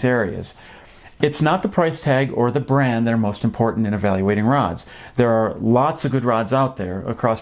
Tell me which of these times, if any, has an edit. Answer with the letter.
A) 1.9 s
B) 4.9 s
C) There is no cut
C